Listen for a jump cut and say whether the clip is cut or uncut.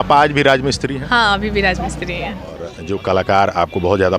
cut